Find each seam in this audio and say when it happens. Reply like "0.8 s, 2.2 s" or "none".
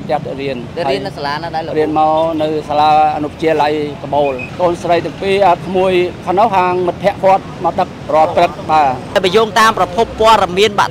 4.5 s, 8.0 s, 9.1 s